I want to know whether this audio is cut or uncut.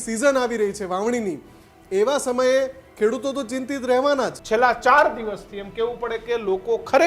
cut